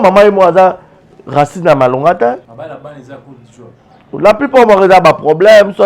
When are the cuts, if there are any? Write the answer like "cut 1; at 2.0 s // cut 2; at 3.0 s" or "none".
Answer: cut 1; at 2.5 s